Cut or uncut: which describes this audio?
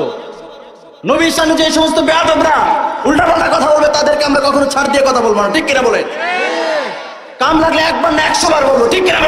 uncut